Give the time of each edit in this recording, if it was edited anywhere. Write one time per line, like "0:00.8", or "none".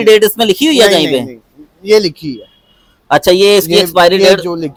none